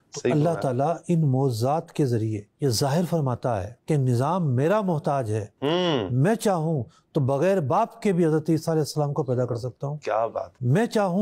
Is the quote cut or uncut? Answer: uncut